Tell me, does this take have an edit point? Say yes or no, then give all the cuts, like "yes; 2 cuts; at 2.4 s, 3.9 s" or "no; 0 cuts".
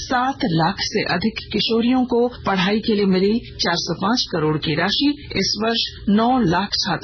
yes; 3 cuts; at 2.4 s, 3.5 s, 5.7 s